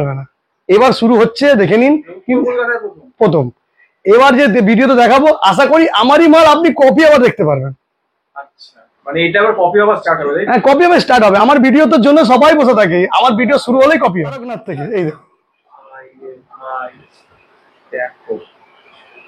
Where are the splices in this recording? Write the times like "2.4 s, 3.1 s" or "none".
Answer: 14.6 s